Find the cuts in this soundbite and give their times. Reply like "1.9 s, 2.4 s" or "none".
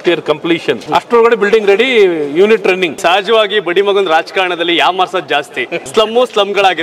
0.9 s, 2.9 s, 5.8 s

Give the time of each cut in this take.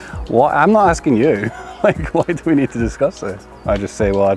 3.4 s

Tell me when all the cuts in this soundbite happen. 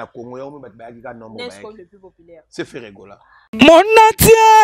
3.3 s

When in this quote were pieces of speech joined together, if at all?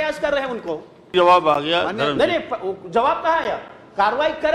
1.1 s

